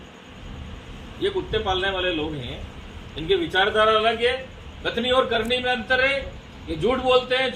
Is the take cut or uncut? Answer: uncut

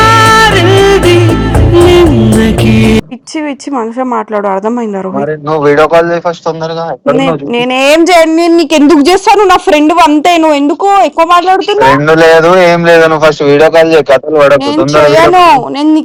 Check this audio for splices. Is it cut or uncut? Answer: uncut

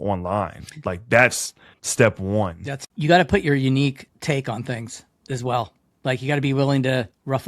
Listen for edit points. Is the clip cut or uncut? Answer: cut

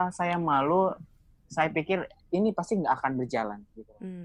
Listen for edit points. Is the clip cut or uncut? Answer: uncut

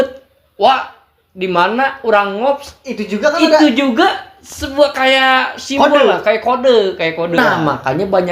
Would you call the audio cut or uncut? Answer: cut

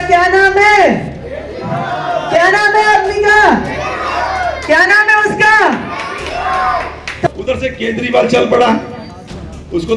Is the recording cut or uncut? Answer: cut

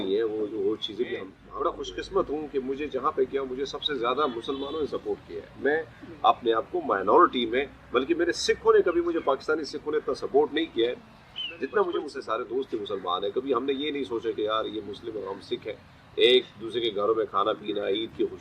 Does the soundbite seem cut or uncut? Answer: cut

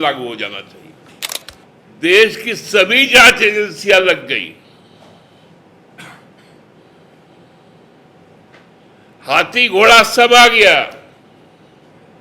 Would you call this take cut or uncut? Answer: cut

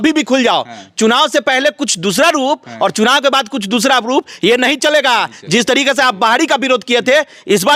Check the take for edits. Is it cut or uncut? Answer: uncut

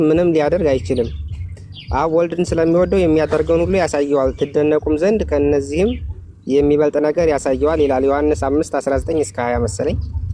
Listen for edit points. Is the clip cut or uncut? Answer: uncut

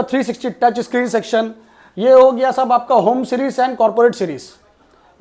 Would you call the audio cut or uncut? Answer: uncut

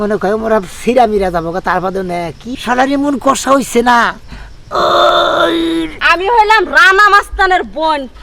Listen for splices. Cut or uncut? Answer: cut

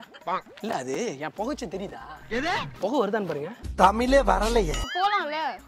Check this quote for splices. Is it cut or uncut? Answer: cut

